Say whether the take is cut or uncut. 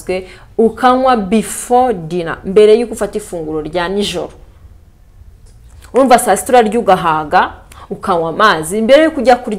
uncut